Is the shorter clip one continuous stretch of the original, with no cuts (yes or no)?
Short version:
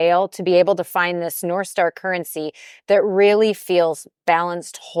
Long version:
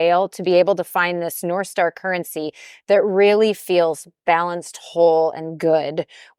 yes